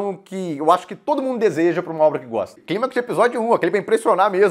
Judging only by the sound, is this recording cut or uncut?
cut